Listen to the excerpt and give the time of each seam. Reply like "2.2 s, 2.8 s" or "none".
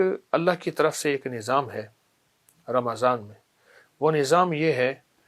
none